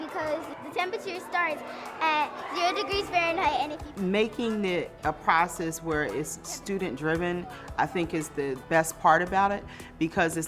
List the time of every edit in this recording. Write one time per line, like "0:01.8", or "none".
0:03.8
0:08.6